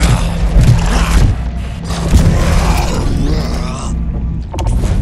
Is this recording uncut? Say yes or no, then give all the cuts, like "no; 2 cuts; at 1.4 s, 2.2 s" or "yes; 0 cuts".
no; 1 cut; at 1.3 s